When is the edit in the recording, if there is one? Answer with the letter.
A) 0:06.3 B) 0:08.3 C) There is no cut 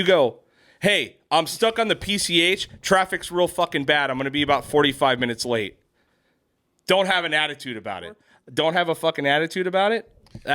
B